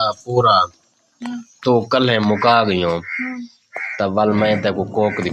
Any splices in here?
no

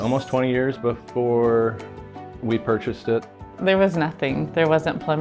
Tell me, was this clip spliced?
yes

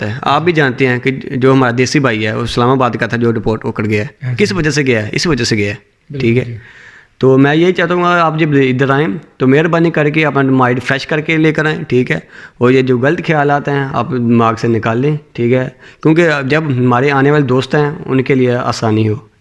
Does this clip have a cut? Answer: no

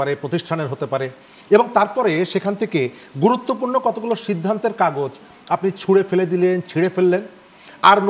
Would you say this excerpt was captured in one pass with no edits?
yes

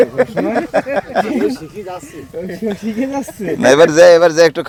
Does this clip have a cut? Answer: no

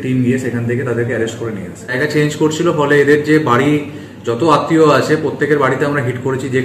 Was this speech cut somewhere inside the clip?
yes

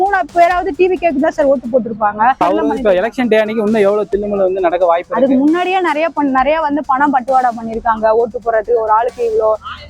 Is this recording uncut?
no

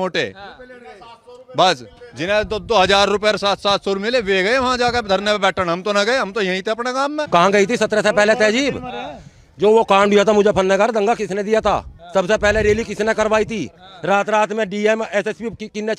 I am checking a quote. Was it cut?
yes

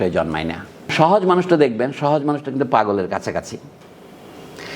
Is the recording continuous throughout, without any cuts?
no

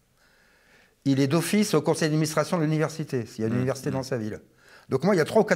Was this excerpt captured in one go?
yes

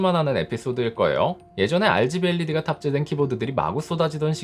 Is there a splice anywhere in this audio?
no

